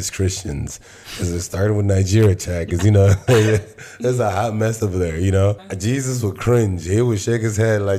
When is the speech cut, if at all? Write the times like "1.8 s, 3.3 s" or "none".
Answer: 5.7 s